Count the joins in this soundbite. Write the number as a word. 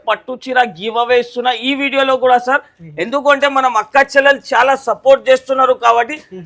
zero